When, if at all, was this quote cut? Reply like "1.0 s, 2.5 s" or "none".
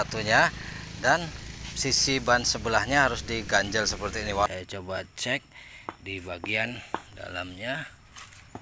4.5 s